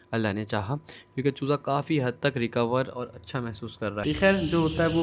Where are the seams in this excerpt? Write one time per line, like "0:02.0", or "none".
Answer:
0:04.0